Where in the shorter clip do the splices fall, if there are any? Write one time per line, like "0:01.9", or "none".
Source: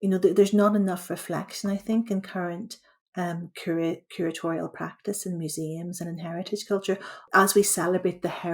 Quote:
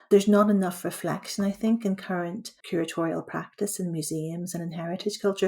0:02.6